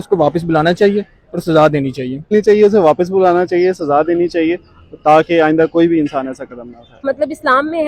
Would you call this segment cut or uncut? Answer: cut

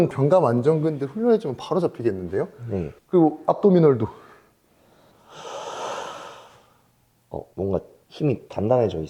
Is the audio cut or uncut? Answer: uncut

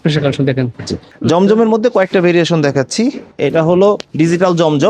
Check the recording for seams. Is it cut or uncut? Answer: cut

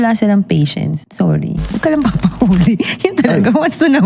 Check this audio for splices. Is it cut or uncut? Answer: cut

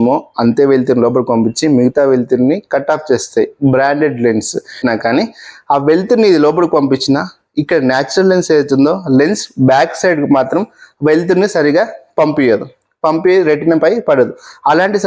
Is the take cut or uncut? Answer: cut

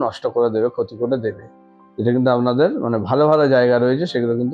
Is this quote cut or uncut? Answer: uncut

